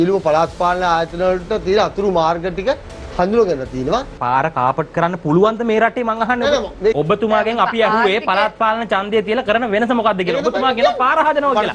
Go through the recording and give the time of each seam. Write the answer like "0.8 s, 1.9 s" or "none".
4.1 s, 6.9 s